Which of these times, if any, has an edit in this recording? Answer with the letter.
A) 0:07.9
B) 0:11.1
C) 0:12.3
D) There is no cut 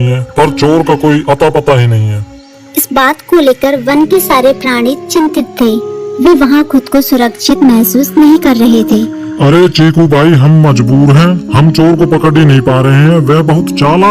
B